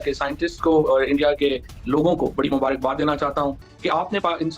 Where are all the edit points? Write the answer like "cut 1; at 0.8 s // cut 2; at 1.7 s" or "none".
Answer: cut 1; at 3.7 s